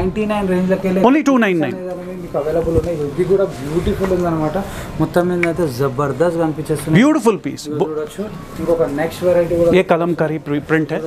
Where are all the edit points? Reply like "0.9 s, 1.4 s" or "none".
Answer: none